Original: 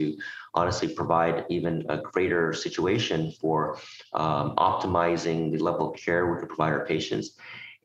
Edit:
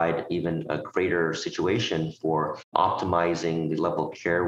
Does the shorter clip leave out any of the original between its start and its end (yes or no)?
yes